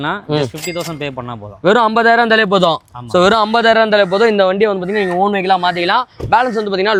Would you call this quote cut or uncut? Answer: uncut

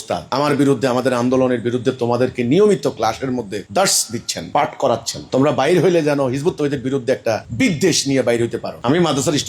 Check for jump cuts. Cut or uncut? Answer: uncut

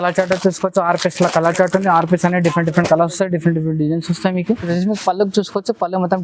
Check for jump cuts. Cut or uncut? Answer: cut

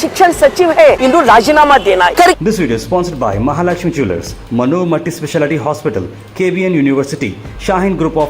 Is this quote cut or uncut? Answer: cut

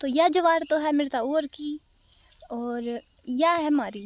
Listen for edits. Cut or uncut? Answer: uncut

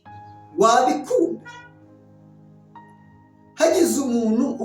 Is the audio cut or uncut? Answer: cut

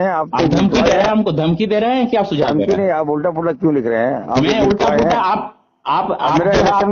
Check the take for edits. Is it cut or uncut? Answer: uncut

